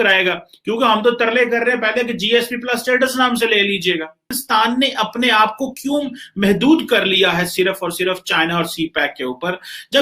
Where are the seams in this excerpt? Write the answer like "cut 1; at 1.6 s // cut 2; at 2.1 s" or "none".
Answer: cut 1; at 4.4 s

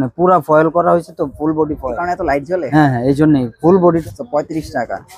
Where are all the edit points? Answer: cut 1; at 4.0 s

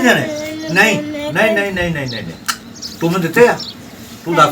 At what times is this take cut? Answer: none

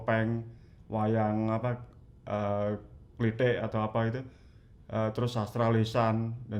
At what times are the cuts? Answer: none

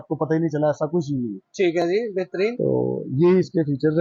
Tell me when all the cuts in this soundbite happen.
none

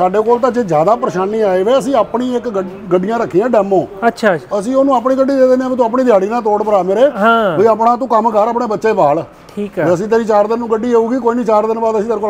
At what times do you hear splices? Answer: none

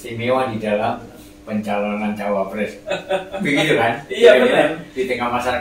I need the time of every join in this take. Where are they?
none

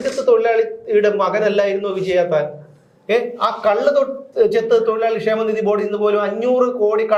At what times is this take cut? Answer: none

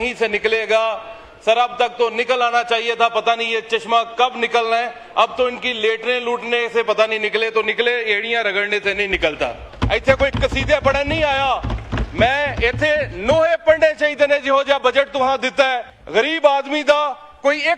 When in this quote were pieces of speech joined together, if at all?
cut 1; at 9.6 s // cut 2; at 15.9 s

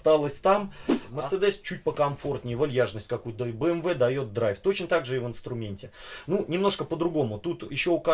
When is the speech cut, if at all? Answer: cut 1; at 1.0 s

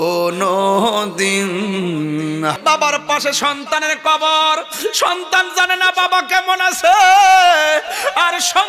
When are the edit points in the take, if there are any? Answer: cut 1; at 2.6 s

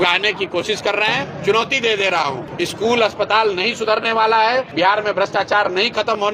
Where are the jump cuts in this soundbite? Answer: cut 1; at 1.3 s // cut 2; at 2.4 s // cut 3; at 4.7 s

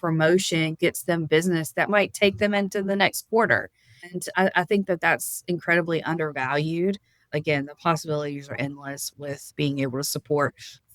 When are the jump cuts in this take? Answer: cut 1; at 1.9 s // cut 2; at 7.3 s // cut 3; at 9.0 s

